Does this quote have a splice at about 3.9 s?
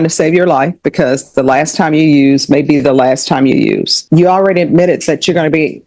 yes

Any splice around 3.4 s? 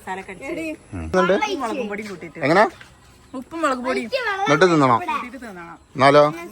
no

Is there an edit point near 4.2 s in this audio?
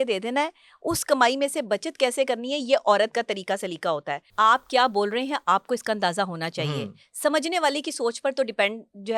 yes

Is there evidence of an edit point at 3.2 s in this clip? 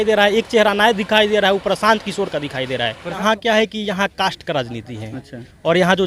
yes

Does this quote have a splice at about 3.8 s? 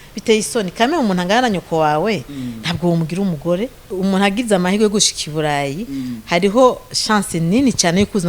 yes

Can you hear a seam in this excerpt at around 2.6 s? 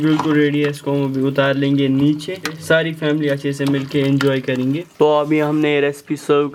no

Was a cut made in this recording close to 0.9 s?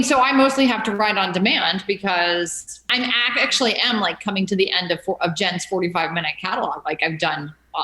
yes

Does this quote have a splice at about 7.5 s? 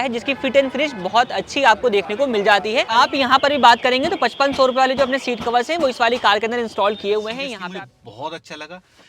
yes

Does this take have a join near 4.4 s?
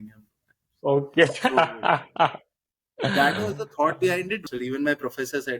yes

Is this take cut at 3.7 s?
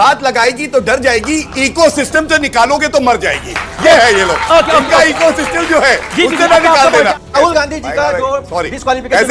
no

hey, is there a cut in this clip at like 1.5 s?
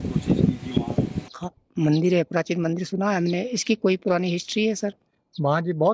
yes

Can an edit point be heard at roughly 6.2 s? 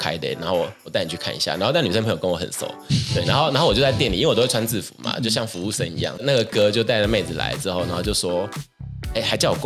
yes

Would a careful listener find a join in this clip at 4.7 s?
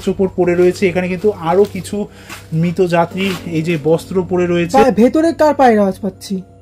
yes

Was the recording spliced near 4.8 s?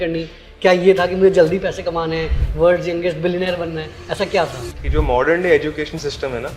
yes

